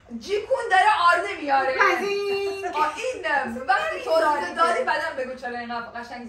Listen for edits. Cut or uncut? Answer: uncut